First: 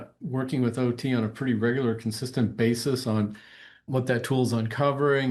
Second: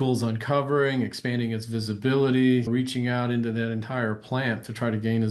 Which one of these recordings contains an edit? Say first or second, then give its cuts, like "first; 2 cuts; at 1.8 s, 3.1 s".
second; 1 cut; at 2.7 s